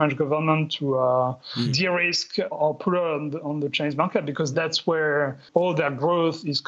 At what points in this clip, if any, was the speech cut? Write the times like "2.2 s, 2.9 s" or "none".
5.4 s